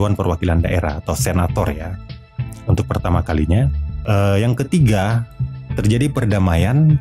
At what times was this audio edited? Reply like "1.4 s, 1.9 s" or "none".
3.9 s